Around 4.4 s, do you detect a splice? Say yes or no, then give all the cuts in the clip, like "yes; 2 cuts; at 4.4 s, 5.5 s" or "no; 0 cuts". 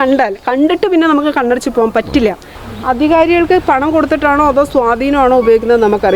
no; 1 cut; at 2.5 s